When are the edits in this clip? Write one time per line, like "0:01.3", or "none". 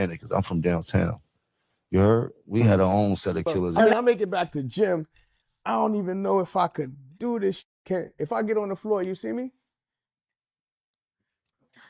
0:03.8